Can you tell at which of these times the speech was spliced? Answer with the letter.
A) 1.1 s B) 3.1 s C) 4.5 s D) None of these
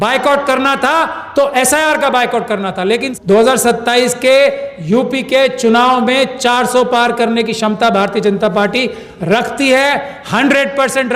B